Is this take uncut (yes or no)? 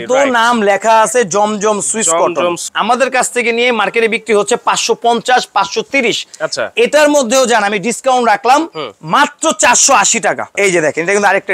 no